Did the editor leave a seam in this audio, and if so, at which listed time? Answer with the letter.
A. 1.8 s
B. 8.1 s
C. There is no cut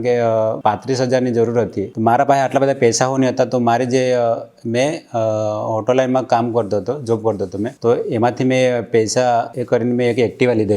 A